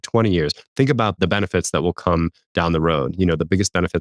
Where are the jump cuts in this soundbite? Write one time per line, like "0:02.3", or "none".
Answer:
0:01.1